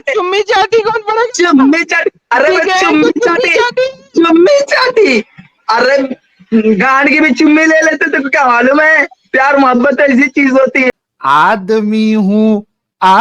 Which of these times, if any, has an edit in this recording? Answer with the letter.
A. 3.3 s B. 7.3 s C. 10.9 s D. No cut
C